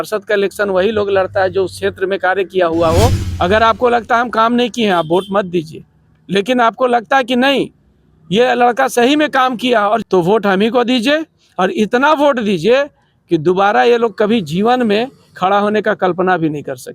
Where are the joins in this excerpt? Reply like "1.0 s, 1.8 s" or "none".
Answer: 3.2 s, 10.0 s